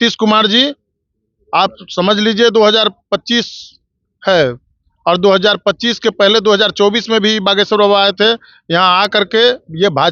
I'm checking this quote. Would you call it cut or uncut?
uncut